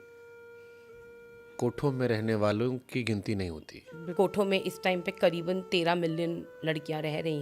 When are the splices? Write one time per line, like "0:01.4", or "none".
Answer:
0:04.1